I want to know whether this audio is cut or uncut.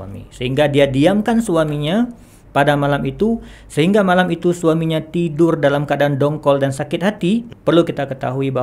cut